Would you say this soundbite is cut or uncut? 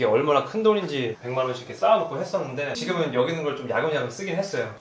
cut